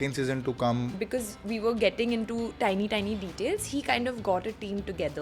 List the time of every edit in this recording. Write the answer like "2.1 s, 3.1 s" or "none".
1.0 s